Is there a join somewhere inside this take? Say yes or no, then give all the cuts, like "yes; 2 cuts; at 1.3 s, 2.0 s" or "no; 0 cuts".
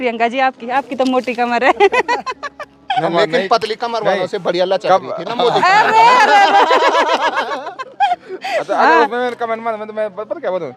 no; 0 cuts